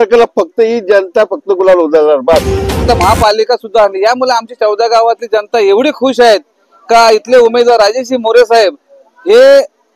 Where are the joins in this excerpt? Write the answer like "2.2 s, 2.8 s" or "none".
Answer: 2.8 s